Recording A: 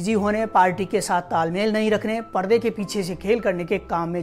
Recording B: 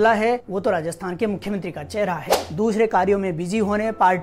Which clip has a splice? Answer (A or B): B